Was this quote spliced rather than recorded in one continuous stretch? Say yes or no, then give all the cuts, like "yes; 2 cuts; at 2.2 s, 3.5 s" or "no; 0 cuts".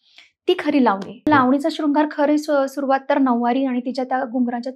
yes; 1 cut; at 1.3 s